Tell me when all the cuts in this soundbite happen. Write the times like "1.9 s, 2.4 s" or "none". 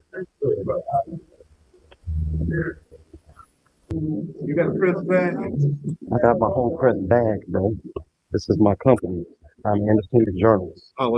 3.8 s